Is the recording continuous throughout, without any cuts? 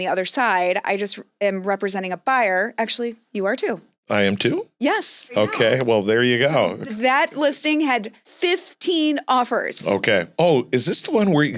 yes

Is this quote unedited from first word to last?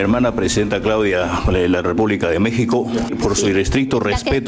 no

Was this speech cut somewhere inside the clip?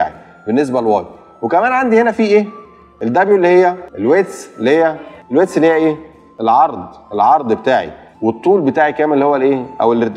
no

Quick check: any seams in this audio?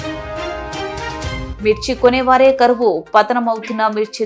yes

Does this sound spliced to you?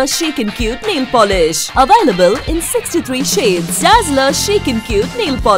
no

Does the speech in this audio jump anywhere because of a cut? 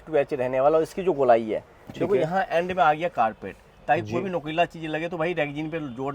no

